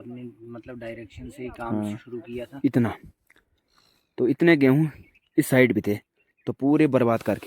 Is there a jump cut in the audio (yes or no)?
yes